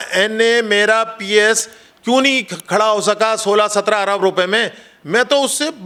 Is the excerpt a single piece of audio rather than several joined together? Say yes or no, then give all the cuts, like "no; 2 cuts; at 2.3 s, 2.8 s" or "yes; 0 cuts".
yes; 0 cuts